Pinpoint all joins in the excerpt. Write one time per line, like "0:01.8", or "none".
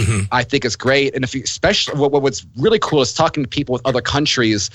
none